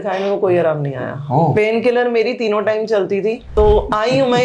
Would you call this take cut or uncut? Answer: cut